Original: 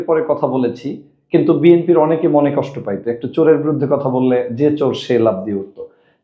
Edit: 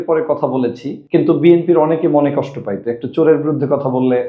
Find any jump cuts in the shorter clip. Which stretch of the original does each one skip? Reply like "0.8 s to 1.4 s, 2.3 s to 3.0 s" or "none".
0.9 s to 1.1 s